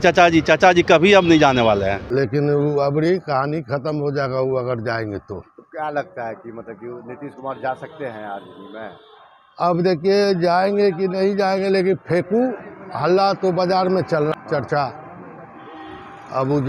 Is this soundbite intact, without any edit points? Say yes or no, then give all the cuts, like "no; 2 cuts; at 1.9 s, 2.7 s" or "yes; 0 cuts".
yes; 0 cuts